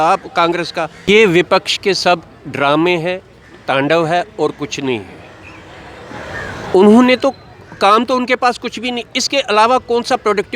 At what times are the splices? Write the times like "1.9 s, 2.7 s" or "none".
1.0 s